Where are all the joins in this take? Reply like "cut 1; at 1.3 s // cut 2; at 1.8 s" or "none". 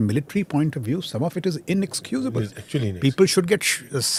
none